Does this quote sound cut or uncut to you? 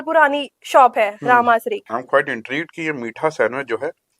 cut